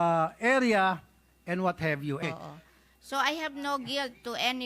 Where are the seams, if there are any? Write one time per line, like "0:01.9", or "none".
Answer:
0:02.2